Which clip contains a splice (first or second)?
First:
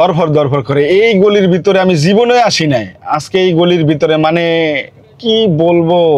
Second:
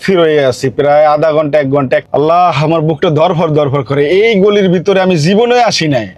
second